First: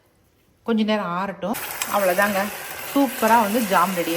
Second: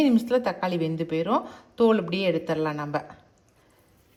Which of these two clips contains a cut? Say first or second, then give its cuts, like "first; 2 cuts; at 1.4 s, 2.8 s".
first; 1 cut; at 1.5 s